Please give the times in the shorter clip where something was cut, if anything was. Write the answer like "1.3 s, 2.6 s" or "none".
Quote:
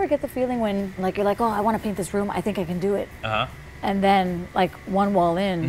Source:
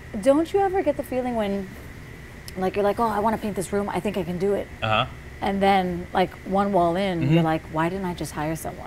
0.9 s